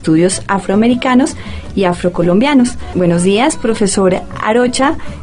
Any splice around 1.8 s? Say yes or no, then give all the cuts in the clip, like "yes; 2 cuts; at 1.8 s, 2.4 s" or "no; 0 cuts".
no; 1 cut; at 3.6 s